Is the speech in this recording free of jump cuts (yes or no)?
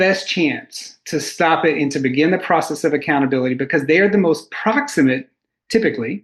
yes